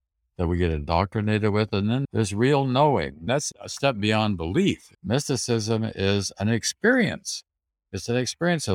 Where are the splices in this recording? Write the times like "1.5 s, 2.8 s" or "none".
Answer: 2.0 s, 3.3 s, 4.9 s